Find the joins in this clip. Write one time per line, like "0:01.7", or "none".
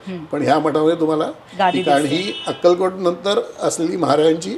none